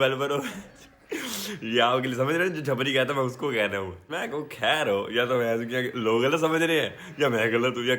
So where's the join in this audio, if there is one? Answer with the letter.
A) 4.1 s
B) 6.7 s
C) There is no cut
A